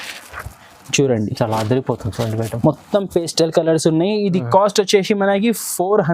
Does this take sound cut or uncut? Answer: uncut